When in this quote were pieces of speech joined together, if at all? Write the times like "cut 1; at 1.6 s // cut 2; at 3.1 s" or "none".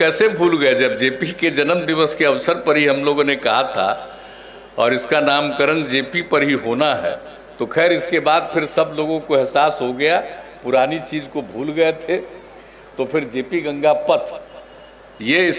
none